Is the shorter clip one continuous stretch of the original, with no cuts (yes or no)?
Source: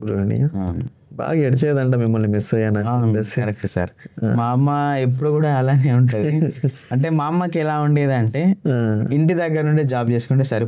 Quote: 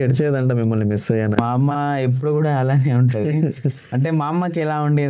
no